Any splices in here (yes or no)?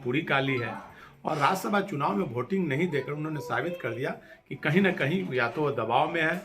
yes